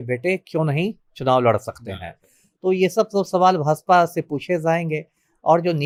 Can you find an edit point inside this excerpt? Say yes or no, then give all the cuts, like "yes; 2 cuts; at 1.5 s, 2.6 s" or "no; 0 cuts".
no; 0 cuts